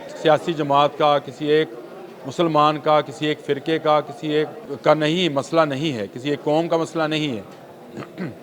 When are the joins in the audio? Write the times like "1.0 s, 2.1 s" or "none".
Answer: 4.6 s